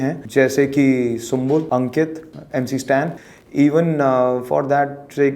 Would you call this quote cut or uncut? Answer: cut